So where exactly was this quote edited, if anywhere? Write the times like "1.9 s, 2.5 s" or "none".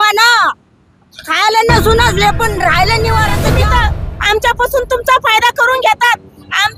3.6 s